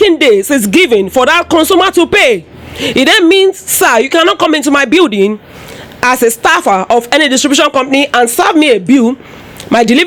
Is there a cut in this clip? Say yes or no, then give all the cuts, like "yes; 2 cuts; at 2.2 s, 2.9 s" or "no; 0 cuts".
no; 0 cuts